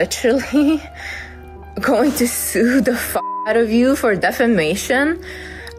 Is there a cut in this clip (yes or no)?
no